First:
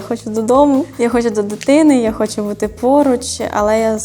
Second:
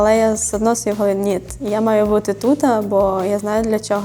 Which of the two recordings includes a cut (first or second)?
first